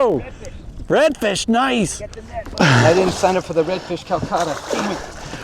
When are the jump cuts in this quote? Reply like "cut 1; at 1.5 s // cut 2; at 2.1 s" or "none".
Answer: cut 1; at 2.6 s